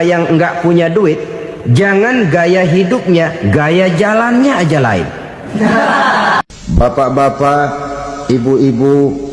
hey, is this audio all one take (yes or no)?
no